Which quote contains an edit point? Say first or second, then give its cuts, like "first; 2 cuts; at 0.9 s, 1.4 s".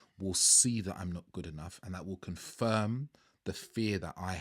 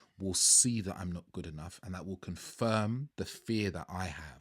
second; 1 cut; at 3.1 s